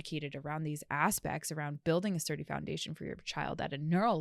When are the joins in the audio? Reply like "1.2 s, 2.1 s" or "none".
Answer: none